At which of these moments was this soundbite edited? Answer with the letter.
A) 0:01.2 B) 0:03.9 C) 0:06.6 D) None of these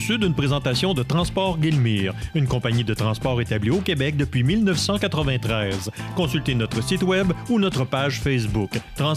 D